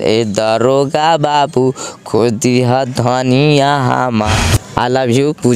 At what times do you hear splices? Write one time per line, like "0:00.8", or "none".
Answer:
0:04.3